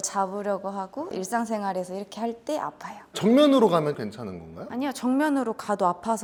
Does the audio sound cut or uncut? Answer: uncut